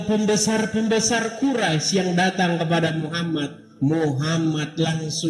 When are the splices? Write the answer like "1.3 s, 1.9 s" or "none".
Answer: none